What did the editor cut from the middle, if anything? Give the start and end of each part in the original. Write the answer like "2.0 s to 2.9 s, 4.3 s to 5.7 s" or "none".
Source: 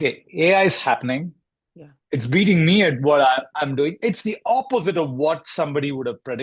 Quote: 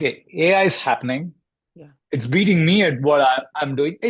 none

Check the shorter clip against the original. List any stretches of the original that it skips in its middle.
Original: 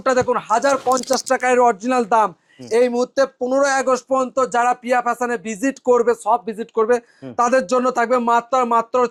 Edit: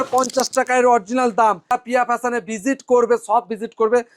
2.4 s to 4.7 s

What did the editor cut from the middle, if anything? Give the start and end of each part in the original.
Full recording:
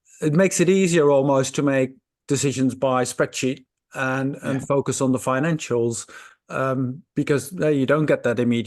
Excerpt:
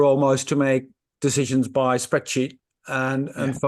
none

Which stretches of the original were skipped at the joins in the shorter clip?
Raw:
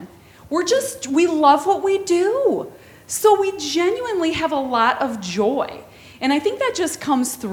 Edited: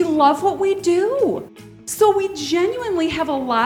none

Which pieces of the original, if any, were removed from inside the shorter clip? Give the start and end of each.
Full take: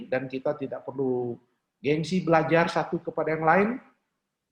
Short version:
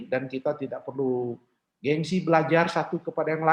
none

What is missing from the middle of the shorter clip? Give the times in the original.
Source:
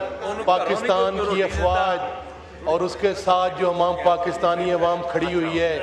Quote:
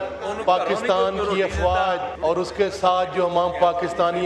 2.1 s to 2.5 s

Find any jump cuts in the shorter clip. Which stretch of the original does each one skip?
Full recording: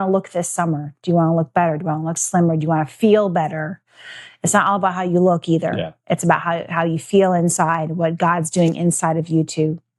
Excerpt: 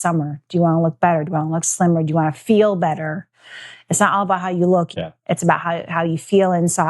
5.5 s to 5.7 s

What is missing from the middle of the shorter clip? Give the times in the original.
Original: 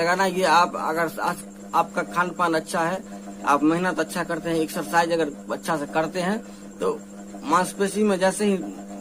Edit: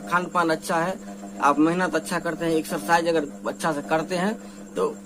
none

